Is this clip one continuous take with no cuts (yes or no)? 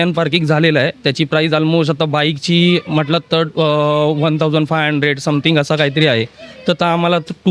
yes